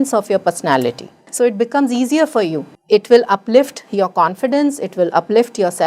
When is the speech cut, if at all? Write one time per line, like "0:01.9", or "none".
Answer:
0:01.2
0:02.7